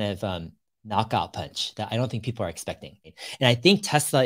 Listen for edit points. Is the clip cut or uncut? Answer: cut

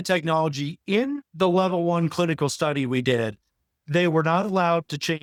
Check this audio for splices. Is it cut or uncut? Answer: uncut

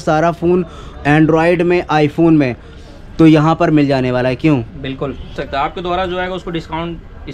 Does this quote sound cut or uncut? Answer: cut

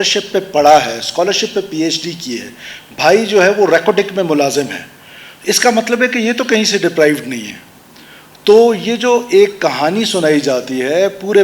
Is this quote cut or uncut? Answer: uncut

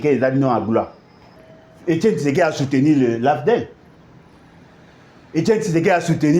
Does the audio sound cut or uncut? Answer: cut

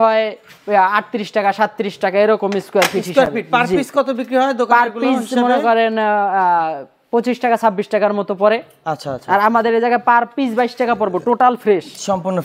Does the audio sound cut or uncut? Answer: uncut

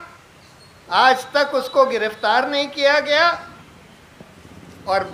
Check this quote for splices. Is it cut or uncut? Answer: uncut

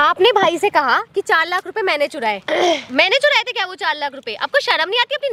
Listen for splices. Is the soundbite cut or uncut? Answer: uncut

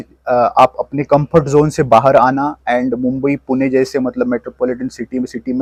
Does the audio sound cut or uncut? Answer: uncut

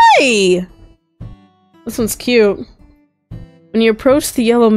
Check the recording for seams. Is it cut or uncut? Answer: uncut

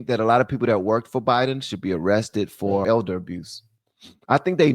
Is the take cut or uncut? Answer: cut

